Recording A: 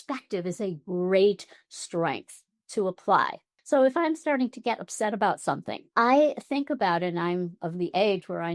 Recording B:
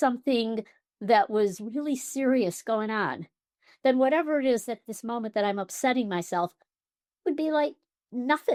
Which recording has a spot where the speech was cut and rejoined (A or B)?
A